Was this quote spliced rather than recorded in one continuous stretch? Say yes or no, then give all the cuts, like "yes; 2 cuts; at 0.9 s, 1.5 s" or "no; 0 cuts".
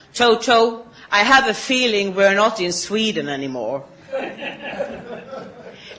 no; 0 cuts